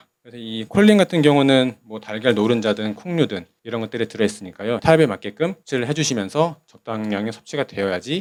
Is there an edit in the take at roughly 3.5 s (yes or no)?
no